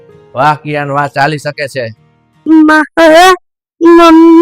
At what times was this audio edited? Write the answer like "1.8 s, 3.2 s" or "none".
2.4 s